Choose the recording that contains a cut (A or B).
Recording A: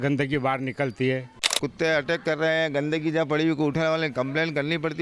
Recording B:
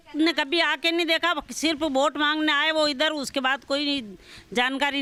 A